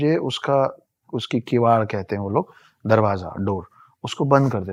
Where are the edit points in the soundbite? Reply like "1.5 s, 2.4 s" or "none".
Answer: none